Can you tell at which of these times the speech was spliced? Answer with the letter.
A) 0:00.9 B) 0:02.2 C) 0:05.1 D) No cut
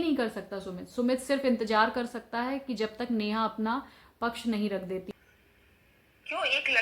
C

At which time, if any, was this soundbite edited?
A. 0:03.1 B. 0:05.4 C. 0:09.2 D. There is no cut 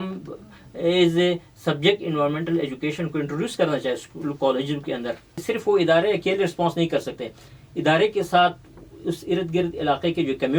B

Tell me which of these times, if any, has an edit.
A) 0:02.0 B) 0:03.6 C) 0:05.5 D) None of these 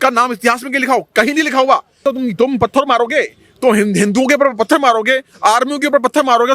A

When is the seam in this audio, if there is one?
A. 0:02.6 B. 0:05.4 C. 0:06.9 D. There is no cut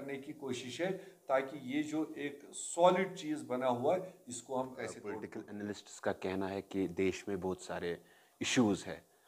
B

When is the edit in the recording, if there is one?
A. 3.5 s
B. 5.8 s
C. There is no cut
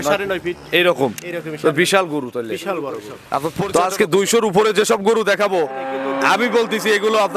A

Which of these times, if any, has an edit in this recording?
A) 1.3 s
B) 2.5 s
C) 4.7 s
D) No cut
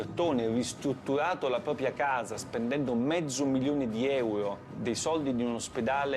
C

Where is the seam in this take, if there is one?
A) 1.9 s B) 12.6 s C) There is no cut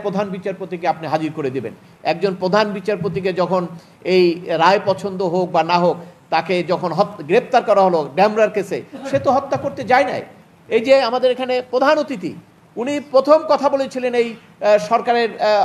A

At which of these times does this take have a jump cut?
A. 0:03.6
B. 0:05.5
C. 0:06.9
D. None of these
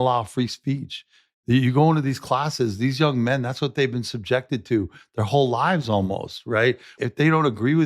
C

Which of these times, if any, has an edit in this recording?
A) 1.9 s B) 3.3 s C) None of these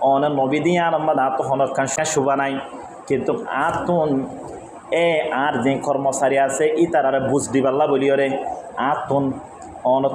A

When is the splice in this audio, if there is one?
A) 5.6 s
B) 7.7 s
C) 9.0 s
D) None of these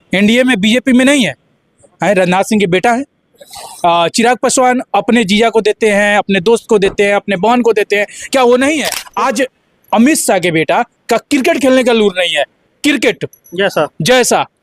C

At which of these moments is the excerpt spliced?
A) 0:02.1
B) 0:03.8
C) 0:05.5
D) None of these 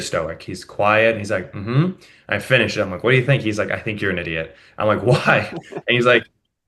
D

